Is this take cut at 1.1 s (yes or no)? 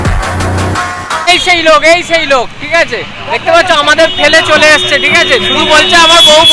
yes